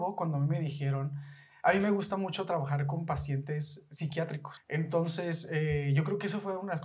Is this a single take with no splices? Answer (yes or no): no